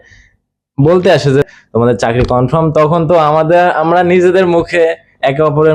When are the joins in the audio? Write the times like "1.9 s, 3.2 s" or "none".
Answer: 1.5 s